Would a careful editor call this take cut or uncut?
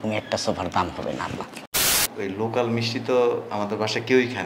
cut